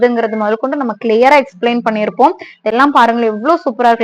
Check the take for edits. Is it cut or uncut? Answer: uncut